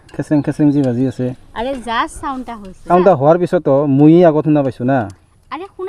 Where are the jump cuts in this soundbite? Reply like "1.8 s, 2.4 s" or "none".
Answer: 2.9 s

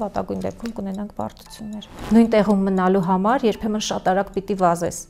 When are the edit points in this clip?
1.9 s

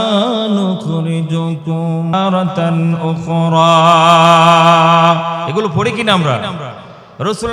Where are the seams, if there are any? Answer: 2.1 s

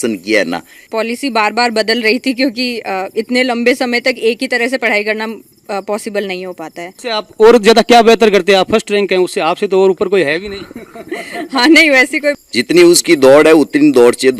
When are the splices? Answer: 0.8 s, 6.9 s, 12.4 s

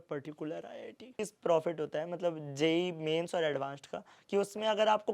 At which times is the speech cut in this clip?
1.2 s

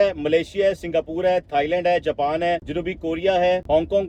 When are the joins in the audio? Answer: none

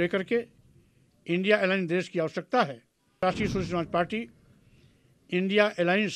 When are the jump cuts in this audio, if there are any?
3.2 s

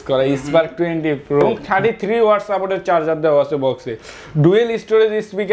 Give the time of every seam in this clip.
1.6 s

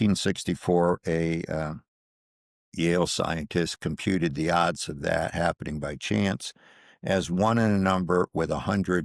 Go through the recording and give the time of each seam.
none

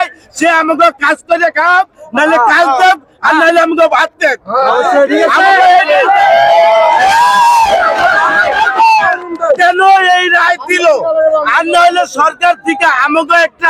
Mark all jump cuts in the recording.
none

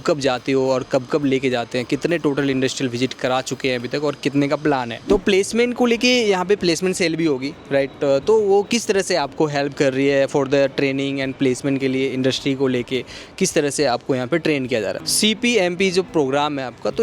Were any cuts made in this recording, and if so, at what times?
5.0 s

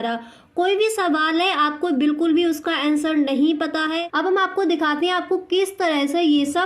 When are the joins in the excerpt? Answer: 4.3 s

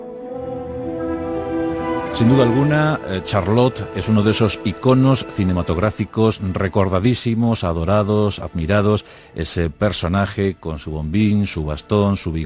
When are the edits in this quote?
2.2 s

